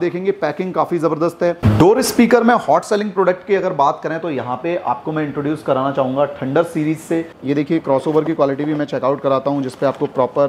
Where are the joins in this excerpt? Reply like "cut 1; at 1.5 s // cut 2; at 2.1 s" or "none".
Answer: cut 1; at 1.6 s // cut 2; at 7.3 s